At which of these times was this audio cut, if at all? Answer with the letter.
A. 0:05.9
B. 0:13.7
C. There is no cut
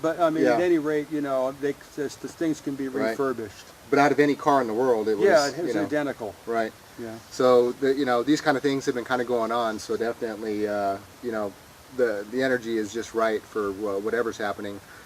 A